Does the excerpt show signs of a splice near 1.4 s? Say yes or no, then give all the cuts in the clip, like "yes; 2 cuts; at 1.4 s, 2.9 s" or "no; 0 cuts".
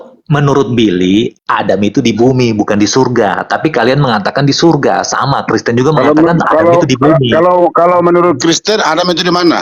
yes; 1 cut; at 1.4 s